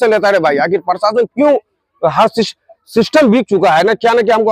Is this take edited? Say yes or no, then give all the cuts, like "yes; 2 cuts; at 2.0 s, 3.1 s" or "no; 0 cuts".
no; 0 cuts